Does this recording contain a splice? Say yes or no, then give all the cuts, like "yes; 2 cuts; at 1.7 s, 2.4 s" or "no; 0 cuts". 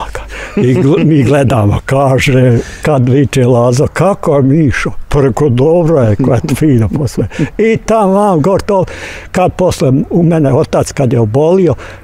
no; 0 cuts